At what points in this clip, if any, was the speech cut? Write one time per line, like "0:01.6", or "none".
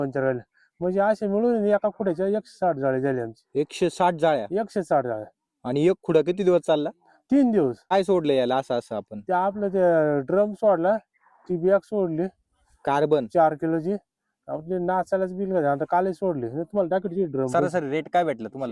0:07.9
0:17.5